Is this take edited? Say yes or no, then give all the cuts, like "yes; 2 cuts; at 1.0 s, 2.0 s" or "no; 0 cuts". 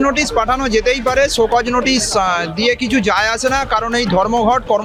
no; 0 cuts